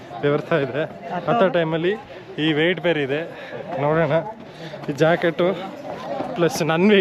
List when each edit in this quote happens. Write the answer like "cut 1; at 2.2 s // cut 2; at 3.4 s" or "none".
none